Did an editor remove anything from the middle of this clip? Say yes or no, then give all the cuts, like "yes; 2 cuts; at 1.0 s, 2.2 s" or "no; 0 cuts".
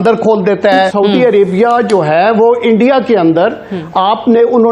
yes; 1 cut; at 0.9 s